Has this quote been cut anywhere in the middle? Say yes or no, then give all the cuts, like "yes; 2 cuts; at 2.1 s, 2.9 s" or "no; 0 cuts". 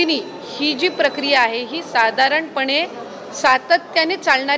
no; 0 cuts